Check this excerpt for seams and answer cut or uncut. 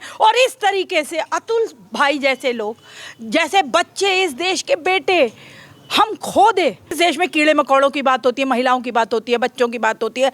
cut